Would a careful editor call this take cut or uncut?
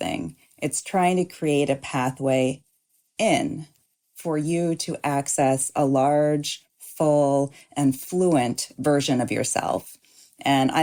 uncut